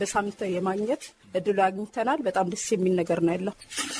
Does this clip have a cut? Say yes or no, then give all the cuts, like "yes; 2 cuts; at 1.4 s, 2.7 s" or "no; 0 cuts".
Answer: yes; 1 cut; at 1.1 s